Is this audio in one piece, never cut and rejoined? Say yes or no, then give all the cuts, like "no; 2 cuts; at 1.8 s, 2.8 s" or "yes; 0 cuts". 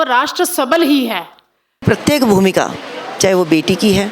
no; 1 cut; at 1.8 s